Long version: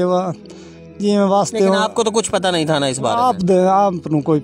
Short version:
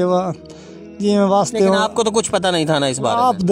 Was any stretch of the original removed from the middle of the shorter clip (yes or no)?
no